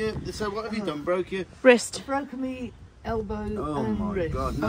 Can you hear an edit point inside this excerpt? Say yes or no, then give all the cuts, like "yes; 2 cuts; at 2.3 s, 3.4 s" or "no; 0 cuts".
no; 0 cuts